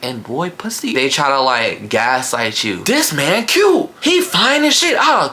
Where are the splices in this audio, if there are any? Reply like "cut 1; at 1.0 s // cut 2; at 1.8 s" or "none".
cut 1; at 0.9 s // cut 2; at 2.7 s // cut 3; at 3.9 s